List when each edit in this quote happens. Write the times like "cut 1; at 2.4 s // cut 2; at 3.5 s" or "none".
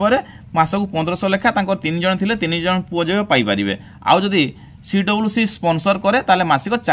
none